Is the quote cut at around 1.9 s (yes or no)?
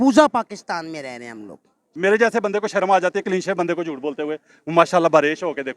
yes